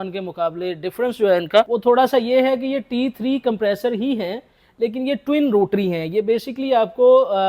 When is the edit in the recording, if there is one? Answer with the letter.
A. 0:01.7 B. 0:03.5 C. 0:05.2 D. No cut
A